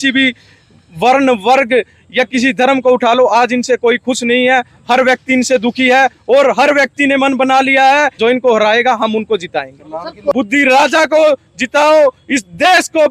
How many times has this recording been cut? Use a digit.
2